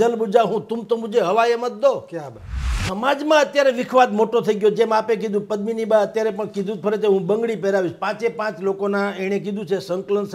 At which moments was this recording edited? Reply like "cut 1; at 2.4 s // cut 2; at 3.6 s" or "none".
cut 1; at 2.8 s